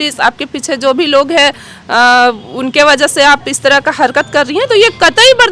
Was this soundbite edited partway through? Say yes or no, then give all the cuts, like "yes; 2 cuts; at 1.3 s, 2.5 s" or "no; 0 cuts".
no; 0 cuts